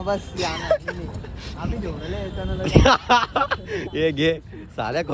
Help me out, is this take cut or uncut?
uncut